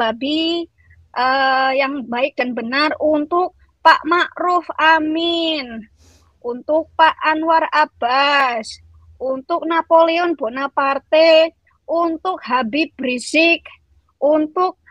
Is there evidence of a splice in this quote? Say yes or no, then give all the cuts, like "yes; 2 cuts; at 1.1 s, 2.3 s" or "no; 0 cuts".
no; 0 cuts